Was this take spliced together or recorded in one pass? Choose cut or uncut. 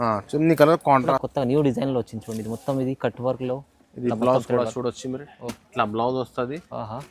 cut